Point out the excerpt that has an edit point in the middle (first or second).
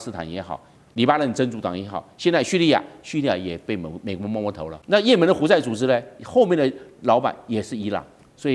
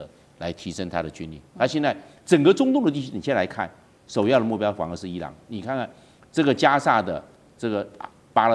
first